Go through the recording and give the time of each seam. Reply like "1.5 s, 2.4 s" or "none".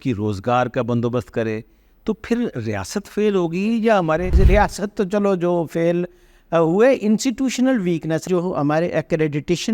4.3 s, 8.2 s